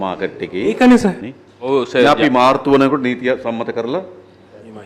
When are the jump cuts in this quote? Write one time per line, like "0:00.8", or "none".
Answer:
0:01.3